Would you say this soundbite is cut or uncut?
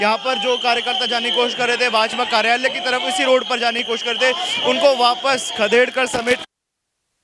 uncut